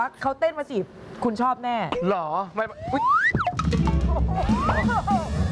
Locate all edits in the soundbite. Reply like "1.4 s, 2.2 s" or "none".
none